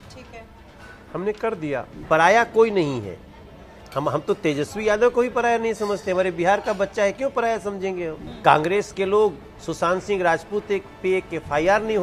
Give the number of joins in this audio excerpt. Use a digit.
2